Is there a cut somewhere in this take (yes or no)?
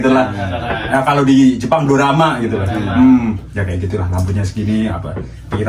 no